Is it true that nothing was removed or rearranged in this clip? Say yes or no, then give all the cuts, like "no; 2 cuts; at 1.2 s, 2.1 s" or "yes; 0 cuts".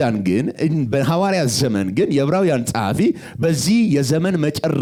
yes; 0 cuts